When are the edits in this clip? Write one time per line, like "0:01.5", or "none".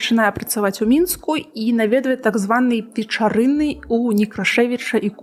none